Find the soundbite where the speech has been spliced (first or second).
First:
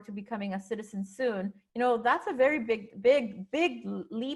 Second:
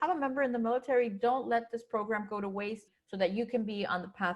second